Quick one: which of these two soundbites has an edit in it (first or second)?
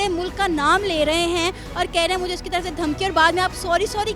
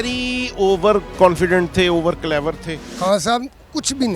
second